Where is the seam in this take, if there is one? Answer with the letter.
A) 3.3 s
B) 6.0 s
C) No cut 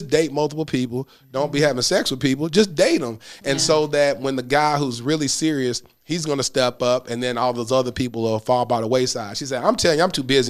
C